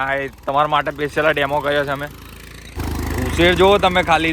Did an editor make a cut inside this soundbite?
yes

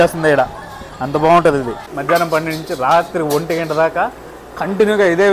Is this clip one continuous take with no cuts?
no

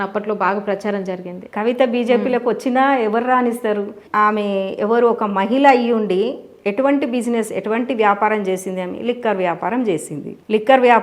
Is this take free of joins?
yes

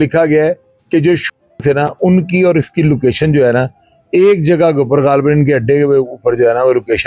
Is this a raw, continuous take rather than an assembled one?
yes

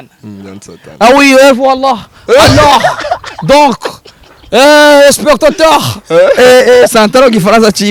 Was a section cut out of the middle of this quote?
no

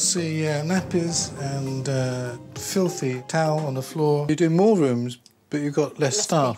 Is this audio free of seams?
no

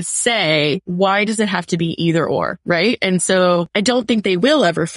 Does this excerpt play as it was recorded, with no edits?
no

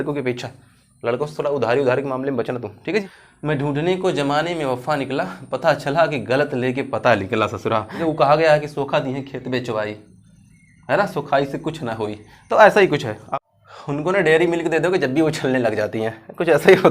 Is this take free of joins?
no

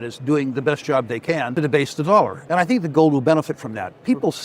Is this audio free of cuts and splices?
no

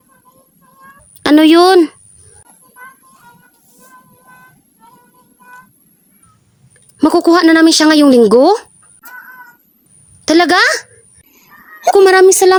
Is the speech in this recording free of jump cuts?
yes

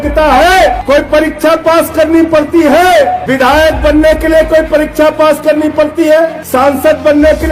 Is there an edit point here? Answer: yes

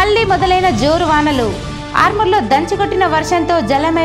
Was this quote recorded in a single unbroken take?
yes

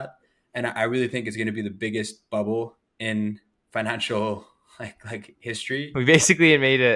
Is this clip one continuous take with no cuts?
no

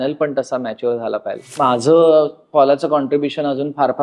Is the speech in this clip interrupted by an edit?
yes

